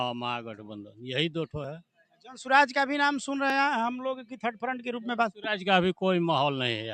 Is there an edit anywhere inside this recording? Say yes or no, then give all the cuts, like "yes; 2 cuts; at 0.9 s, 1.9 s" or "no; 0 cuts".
no; 0 cuts